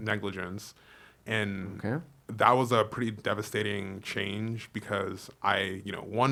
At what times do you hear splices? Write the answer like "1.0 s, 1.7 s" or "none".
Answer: none